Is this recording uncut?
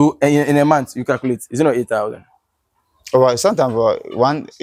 yes; 0 cuts

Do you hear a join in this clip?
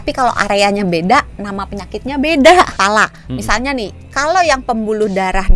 yes; 1 cut; at 2.8 s

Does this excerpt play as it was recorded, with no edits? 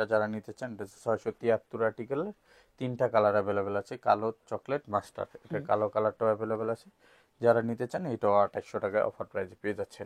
yes; 0 cuts

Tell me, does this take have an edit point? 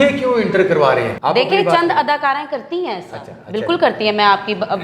yes; 1 cut; at 1.1 s

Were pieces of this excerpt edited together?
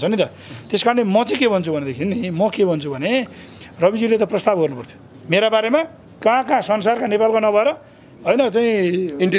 no; 0 cuts

